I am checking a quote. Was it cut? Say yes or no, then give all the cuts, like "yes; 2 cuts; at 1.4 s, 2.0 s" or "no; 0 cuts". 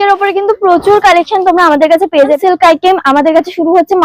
yes; 1 cut; at 2.4 s